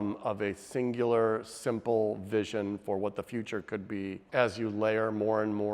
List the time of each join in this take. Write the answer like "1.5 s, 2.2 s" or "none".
4.2 s

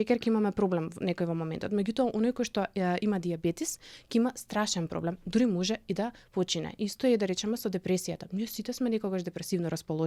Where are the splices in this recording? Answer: none

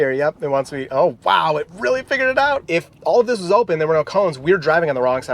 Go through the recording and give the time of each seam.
2.6 s

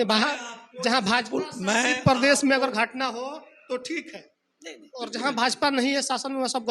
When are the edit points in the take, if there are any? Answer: none

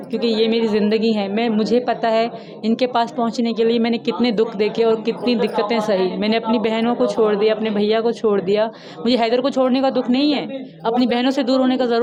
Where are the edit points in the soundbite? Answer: none

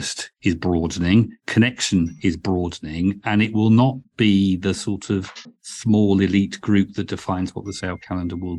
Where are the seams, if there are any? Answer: none

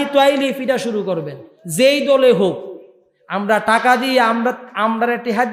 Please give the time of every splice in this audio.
none

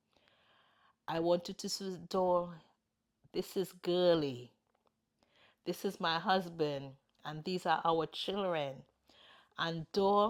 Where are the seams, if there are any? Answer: none

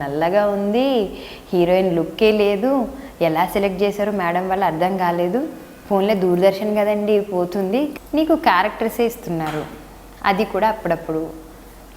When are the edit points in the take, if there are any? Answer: 7.9 s

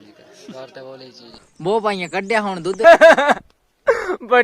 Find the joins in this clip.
1.2 s, 2.8 s

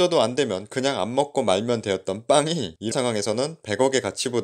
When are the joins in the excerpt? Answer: 2.9 s

